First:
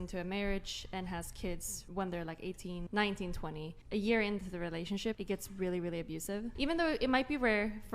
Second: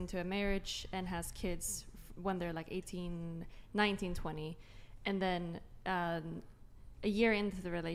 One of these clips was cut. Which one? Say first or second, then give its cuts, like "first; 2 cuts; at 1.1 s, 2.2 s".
first; 5 cuts; at 1.7 s, 2.8 s, 3.7 s, 5.2 s, 6.5 s